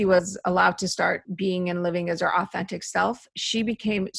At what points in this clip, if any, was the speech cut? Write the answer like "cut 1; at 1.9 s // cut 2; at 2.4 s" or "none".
cut 1; at 1.3 s